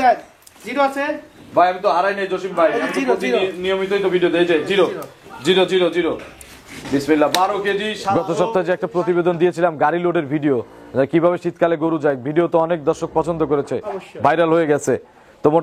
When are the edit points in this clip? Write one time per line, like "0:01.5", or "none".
0:08.1